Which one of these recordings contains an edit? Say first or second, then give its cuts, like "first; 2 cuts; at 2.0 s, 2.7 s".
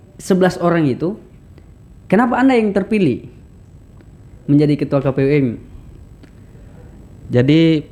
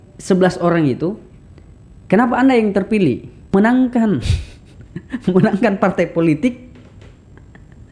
second; 1 cut; at 3.5 s